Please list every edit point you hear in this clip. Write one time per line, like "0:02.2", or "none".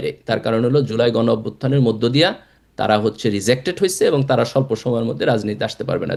none